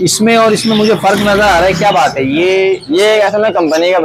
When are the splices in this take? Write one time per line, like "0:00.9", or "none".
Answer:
none